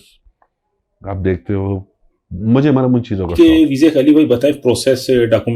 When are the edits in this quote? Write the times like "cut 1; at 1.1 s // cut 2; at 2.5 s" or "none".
cut 1; at 3.3 s